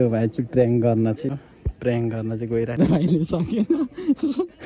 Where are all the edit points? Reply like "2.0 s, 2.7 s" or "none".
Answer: 1.3 s, 2.8 s